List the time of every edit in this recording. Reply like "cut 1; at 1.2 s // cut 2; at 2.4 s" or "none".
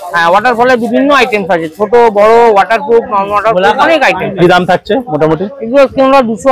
none